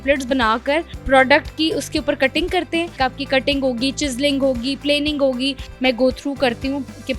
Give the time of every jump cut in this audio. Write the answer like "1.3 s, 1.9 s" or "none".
2.9 s, 5.6 s